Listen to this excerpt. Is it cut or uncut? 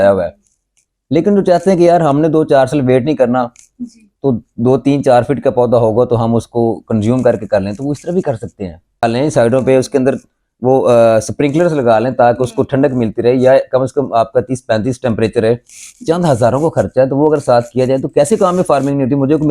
cut